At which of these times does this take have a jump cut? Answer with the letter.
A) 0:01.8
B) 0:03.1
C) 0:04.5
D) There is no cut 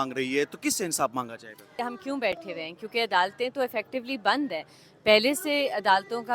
A